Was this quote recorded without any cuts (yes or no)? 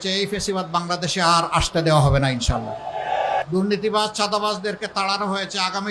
no